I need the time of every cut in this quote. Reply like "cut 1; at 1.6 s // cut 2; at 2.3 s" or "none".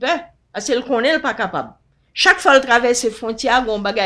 none